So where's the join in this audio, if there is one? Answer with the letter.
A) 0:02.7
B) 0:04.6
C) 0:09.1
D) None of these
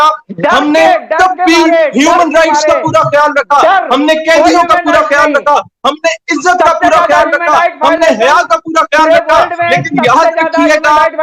D